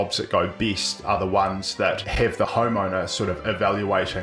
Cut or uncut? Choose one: cut